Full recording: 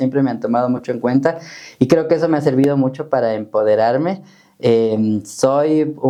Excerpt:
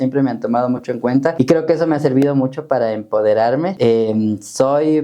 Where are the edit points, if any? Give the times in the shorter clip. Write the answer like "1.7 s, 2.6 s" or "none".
1.3 s, 3.7 s